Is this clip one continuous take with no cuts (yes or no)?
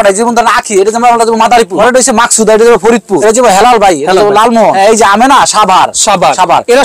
no